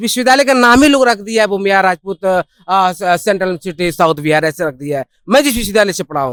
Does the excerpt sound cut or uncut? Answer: uncut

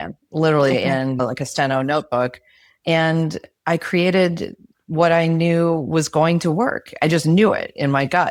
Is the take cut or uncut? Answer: uncut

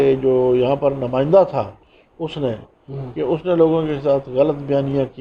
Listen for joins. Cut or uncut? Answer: uncut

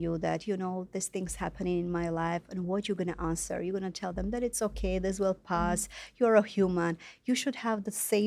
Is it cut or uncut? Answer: uncut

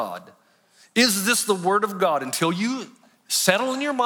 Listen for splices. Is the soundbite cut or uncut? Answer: uncut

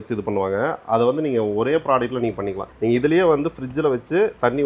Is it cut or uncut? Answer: uncut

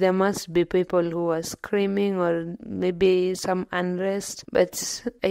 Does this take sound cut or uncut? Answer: cut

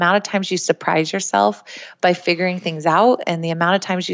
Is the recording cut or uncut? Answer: uncut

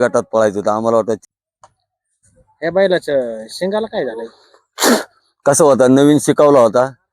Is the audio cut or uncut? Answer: cut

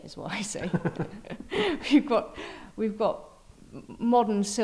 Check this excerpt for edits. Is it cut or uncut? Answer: uncut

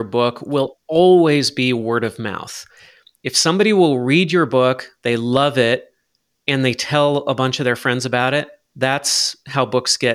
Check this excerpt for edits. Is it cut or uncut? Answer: uncut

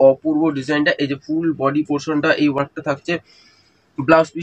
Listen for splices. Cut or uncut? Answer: uncut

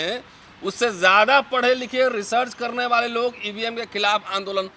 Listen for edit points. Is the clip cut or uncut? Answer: uncut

